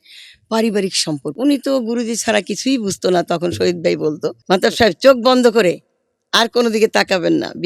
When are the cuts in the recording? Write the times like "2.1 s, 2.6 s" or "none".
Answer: 1.3 s, 4.3 s